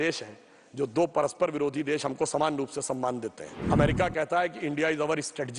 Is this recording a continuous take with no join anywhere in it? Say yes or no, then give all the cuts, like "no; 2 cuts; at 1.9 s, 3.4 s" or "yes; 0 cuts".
no; 1 cut; at 3.5 s